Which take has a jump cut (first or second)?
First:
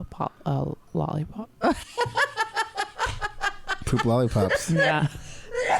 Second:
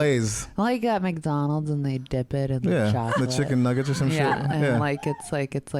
first